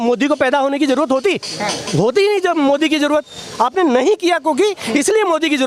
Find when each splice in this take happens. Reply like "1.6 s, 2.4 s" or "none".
none

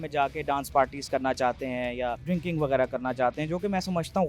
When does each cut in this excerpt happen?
2.2 s

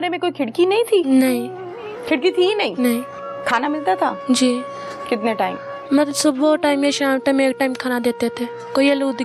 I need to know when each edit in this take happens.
none

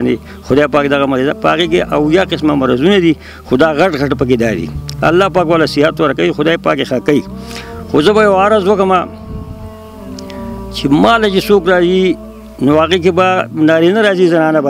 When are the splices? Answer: none

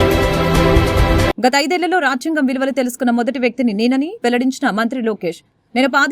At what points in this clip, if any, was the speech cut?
1.3 s

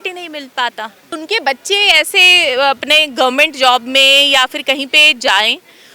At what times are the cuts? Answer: 1.1 s

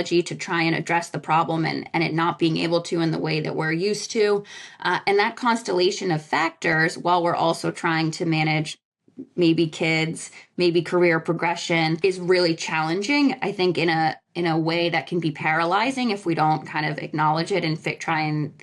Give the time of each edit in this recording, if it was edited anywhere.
none

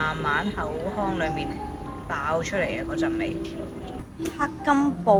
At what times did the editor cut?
none

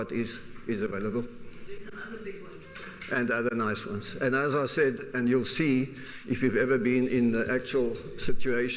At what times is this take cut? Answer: 6.4 s

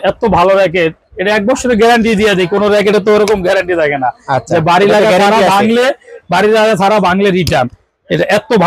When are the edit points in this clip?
none

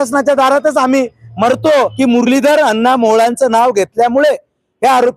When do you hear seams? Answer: 1.9 s

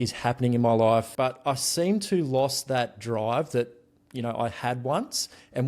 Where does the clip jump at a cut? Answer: 1.1 s

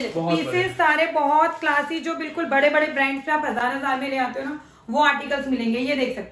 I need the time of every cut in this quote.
none

